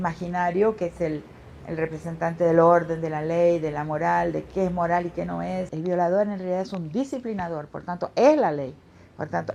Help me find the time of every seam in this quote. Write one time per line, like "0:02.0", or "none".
0:05.7